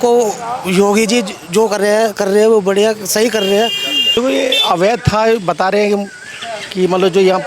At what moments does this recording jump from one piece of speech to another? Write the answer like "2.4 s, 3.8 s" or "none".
4.1 s

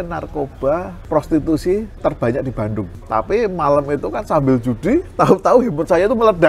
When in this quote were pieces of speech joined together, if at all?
1.0 s, 1.9 s, 3.0 s

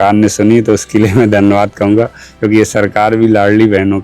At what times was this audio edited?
none

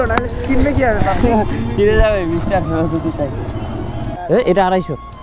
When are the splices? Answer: 4.1 s

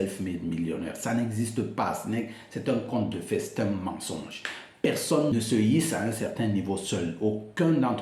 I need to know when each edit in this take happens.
5.3 s

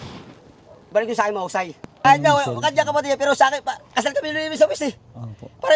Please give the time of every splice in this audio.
2.0 s

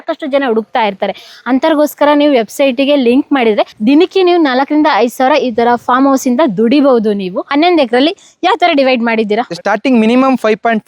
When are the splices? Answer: 7.4 s, 9.5 s

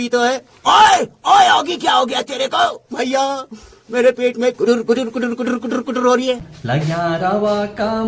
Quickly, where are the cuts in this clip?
6.5 s

